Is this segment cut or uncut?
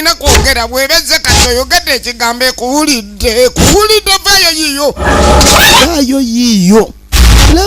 uncut